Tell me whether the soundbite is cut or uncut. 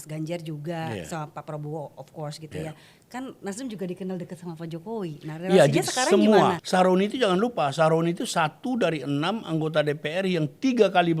cut